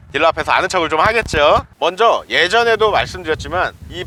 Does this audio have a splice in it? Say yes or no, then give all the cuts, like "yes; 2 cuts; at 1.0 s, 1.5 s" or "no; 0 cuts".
no; 0 cuts